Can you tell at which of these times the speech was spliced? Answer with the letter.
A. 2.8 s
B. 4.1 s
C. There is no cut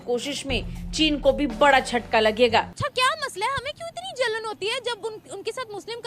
A